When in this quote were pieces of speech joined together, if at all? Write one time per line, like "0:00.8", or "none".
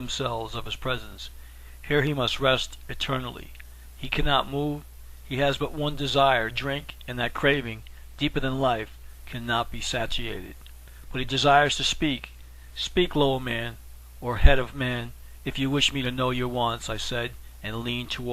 none